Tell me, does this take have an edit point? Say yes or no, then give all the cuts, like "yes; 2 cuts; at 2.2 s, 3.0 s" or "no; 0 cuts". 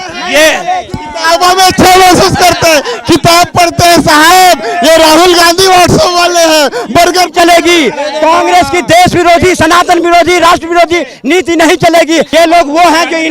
yes; 1 cut; at 12.3 s